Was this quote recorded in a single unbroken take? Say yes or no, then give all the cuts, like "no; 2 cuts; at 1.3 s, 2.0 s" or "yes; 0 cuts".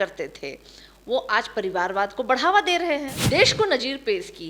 no; 1 cut; at 3.1 s